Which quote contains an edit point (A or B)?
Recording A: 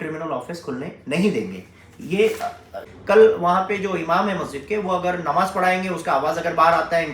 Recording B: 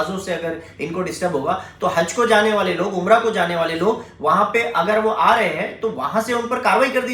A